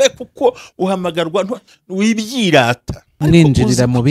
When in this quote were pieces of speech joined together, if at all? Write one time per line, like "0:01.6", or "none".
0:03.1